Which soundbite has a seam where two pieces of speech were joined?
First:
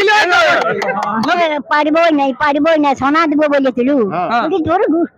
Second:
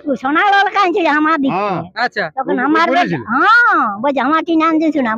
first; 1 cut; at 1.4 s

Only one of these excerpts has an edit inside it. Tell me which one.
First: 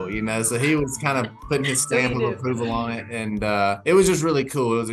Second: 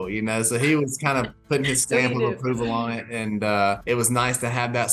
second; 1 cut; at 3.8 s

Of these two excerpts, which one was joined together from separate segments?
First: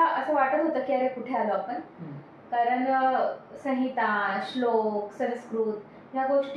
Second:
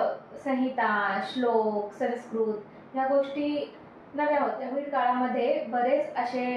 second; 1 cut; at 4.6 s

